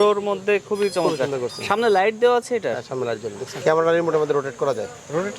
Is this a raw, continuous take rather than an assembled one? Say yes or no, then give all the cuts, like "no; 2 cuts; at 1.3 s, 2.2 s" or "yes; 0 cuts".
no; 1 cut; at 3.5 s